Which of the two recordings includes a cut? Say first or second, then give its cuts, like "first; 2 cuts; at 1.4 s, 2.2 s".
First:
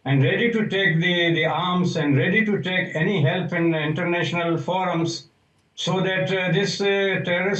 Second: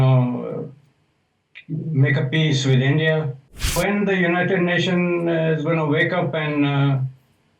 second; 1 cut; at 3.8 s